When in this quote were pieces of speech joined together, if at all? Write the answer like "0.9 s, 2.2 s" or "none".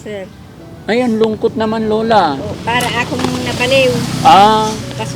2.5 s